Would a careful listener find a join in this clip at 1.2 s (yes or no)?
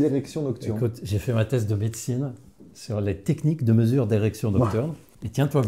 no